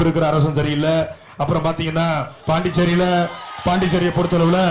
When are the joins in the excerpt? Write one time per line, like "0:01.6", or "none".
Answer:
0:02.3
0:03.5